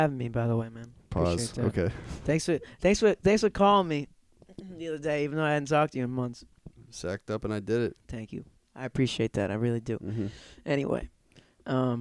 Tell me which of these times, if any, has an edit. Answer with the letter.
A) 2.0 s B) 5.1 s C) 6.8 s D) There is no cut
D